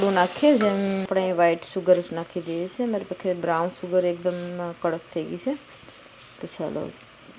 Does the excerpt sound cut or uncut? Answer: cut